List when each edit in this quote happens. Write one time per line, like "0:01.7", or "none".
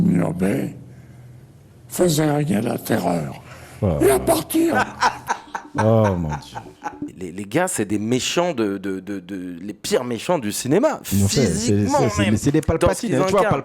0:07.1

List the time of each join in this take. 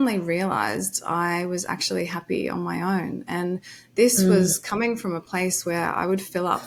none

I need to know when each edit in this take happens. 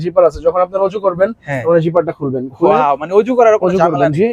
none

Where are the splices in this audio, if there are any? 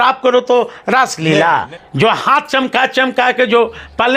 0:01.8

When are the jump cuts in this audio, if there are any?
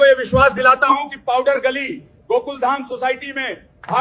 none

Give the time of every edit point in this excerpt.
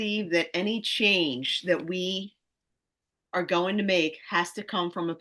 none

